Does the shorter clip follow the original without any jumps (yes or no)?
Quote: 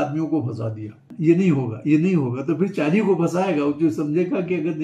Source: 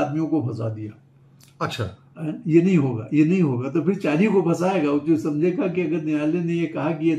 no